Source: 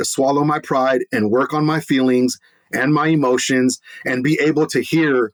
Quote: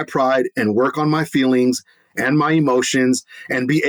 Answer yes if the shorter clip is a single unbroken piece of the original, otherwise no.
yes